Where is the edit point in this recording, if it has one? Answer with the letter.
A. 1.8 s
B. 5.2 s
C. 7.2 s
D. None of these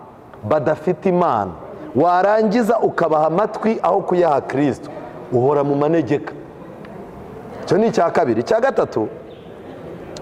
D